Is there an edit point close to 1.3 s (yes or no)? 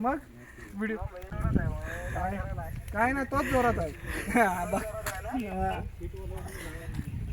yes